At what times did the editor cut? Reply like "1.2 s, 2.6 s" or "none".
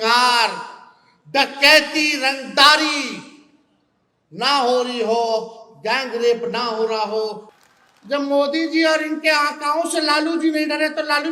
7.5 s